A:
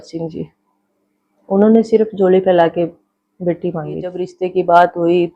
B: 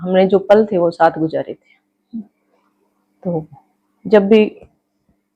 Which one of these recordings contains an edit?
A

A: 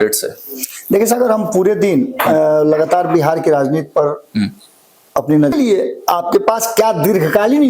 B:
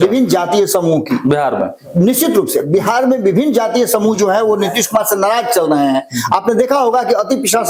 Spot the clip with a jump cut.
A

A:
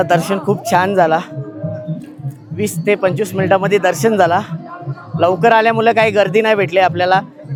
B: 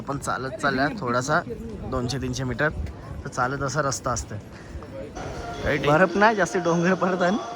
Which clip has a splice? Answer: B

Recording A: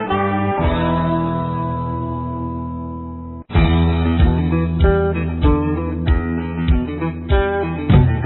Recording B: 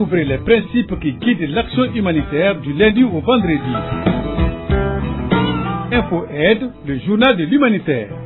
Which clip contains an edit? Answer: A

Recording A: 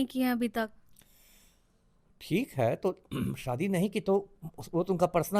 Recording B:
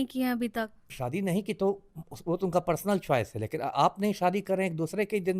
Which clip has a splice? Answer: B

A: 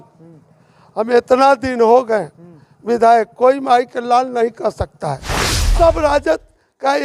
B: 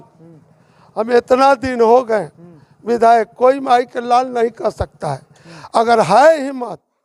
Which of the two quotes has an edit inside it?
A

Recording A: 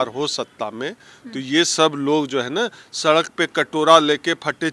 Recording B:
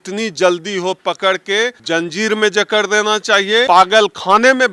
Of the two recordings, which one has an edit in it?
B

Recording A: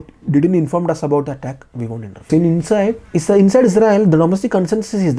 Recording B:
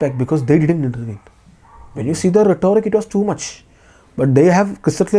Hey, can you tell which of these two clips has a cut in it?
A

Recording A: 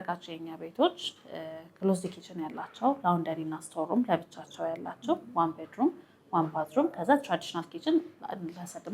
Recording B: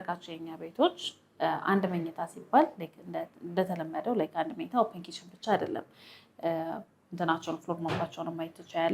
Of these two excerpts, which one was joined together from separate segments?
A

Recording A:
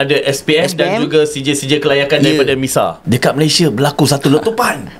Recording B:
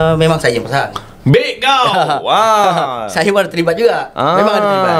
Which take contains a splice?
A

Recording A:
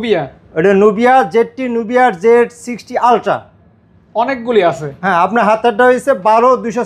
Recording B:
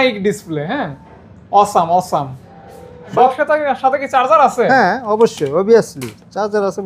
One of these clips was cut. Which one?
B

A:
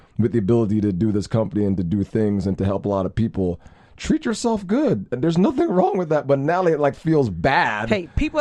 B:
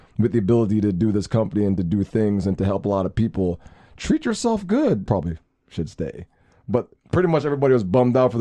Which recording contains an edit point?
B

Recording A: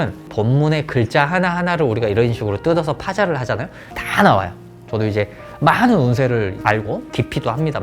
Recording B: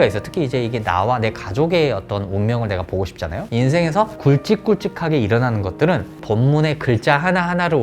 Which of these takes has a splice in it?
B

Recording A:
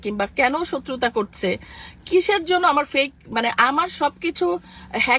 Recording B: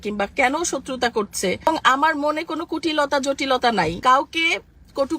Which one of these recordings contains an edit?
B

